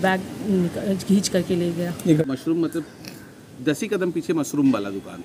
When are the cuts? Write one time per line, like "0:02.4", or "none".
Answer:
0:02.2